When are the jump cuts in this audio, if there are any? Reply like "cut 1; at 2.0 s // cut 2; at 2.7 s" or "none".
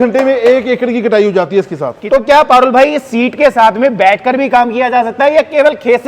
cut 1; at 1.9 s